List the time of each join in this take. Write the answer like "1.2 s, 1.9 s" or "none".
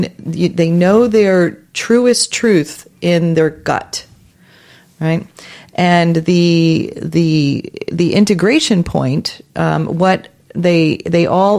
none